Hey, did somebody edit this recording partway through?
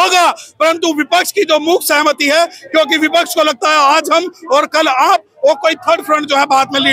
no; 0 cuts

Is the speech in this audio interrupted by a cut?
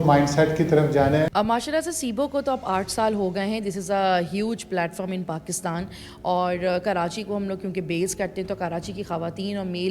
yes; 1 cut; at 1.3 s

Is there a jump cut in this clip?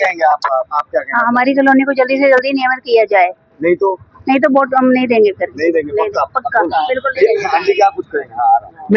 no; 0 cuts

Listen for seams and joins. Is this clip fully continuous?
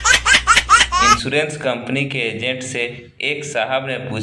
no; 1 cut; at 1.1 s

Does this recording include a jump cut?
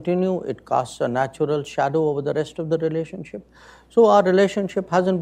no; 0 cuts

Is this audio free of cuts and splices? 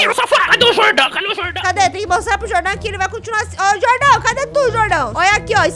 yes; 0 cuts

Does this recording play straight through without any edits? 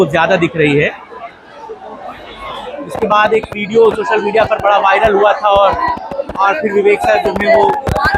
yes; 0 cuts

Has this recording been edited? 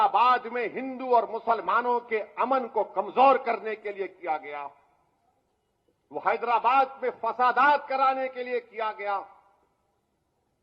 no; 0 cuts

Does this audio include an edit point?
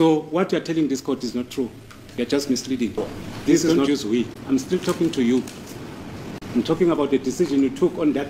yes; 1 cut; at 3.9 s

